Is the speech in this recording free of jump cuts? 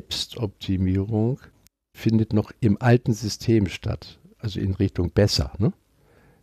yes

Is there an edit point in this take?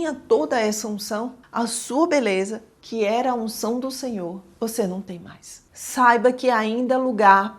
yes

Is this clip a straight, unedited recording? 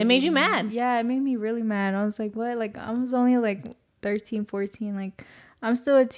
yes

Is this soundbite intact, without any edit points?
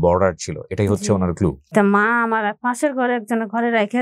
no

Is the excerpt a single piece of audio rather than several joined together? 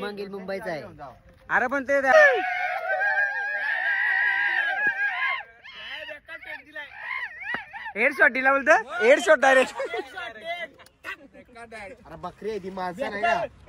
no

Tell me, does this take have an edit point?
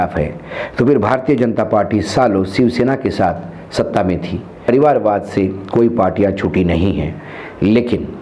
yes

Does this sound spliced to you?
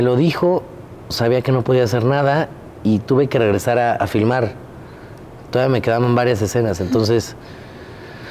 no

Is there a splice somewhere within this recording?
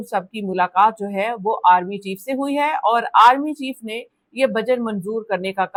no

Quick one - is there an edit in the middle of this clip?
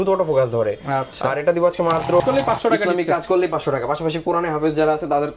yes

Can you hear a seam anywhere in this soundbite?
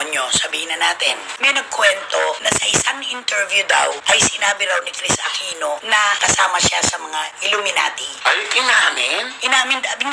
yes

